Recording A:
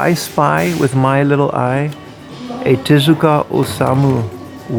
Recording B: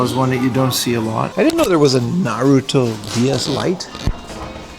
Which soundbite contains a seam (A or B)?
B